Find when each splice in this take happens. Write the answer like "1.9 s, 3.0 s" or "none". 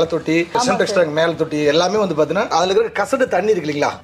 none